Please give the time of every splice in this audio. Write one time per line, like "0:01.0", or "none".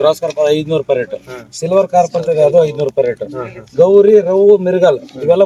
none

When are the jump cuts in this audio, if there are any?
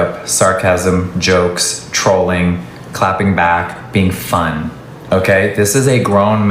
0:04.9

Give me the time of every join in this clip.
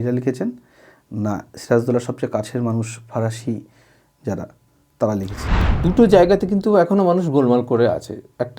0:05.6

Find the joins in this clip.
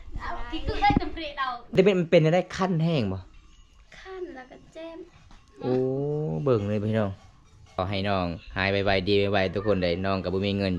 0:01.8
0:07.8

